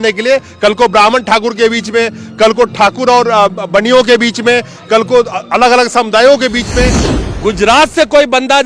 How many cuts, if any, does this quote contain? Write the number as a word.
one